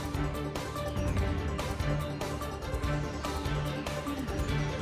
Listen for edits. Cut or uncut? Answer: uncut